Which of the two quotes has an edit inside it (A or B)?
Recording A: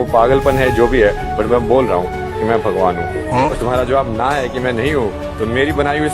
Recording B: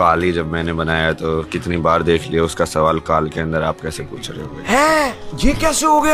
A